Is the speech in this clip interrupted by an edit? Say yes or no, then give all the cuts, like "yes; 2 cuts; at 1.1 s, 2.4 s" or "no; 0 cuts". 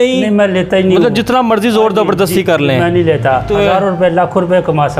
yes; 1 cut; at 3.5 s